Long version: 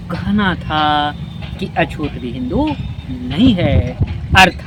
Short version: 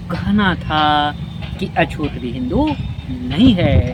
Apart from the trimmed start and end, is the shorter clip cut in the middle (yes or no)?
no